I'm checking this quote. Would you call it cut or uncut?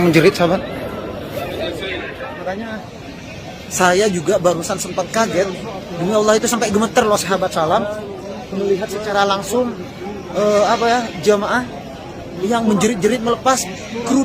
cut